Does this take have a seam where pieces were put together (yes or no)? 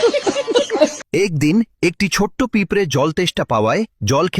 yes